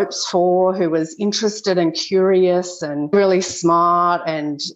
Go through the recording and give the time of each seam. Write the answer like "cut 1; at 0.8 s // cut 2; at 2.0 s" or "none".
cut 1; at 3.1 s